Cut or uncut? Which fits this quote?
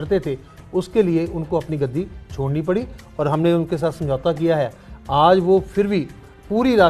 uncut